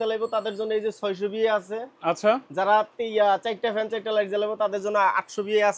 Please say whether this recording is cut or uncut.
uncut